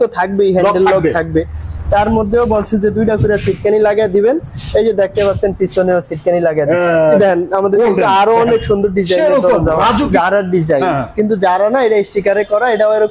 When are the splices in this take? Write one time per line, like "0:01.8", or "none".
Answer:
0:07.2
0:10.1